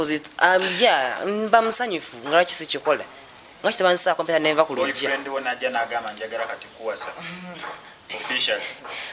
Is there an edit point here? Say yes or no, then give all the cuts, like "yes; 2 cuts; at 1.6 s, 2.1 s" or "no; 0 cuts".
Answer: no; 0 cuts